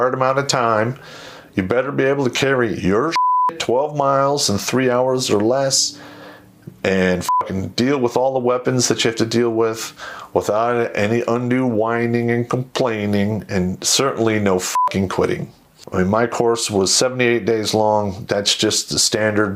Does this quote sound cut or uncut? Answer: cut